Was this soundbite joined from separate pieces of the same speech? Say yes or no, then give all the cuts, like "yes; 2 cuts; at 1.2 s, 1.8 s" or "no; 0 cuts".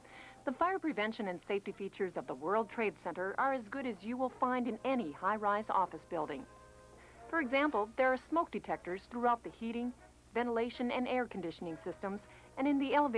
yes; 1 cut; at 9.6 s